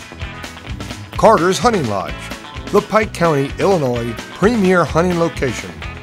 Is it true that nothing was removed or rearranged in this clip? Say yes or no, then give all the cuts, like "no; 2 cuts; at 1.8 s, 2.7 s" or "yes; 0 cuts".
no; 1 cut; at 1.0 s